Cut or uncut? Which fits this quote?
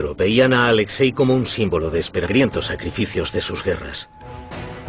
uncut